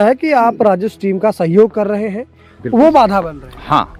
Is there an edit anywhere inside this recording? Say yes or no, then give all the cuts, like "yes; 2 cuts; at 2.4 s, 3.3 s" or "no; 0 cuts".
no; 0 cuts